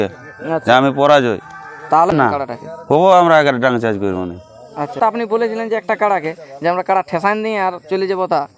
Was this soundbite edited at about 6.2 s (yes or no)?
no